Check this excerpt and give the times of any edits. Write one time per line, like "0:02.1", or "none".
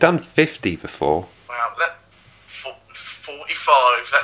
0:01.4

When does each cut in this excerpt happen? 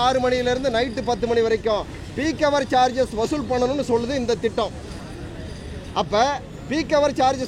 none

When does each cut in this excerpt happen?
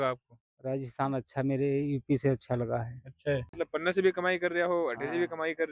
0:03.5

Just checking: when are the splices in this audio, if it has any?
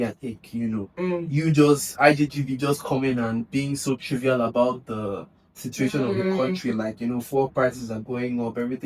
none

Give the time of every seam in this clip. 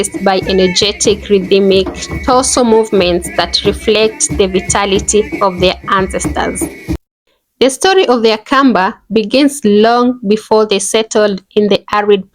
0:07.0

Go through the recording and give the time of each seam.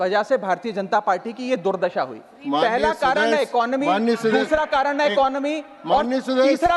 none

